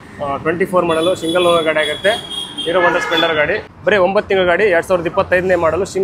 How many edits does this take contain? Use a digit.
1